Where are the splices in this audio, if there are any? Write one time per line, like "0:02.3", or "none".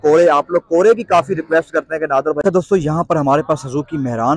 0:02.4